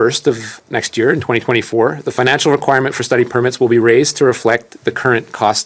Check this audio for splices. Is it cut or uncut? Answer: uncut